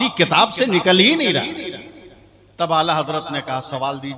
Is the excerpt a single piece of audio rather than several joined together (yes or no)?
yes